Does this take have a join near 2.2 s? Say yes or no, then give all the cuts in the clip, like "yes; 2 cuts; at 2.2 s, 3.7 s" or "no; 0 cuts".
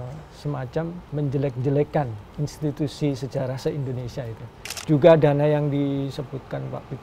no; 2 cuts; at 1.0 s, 4.6 s